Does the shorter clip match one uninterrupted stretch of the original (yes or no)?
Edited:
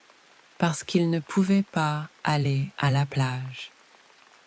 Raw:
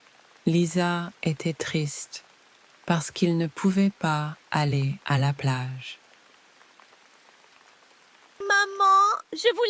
no